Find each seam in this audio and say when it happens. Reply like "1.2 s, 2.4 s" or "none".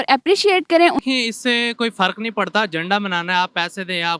1.0 s